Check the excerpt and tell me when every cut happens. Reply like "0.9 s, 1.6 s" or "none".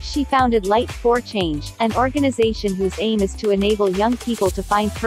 none